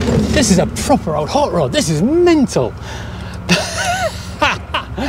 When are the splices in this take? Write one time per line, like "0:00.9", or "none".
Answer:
none